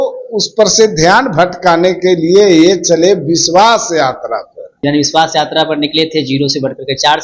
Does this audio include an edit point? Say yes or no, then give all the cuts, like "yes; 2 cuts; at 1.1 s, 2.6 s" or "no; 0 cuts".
yes; 1 cut; at 4.8 s